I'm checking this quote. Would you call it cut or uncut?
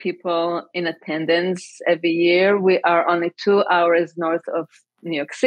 uncut